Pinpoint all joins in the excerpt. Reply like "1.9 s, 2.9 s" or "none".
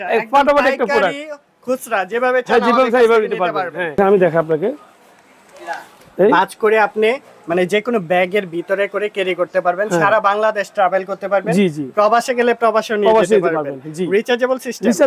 4.0 s